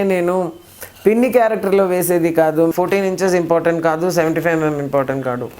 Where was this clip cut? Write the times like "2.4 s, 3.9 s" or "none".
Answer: 2.7 s